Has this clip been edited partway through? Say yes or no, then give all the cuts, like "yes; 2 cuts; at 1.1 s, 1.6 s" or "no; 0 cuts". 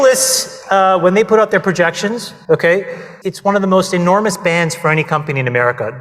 yes; 2 cuts; at 2.3 s, 3.1 s